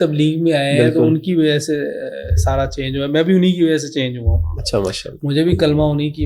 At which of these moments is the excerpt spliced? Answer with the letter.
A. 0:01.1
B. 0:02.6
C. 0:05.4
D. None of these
D